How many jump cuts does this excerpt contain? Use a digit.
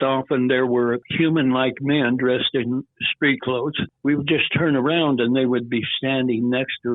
2